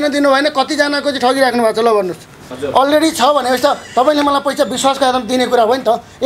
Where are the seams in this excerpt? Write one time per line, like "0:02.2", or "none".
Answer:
0:02.5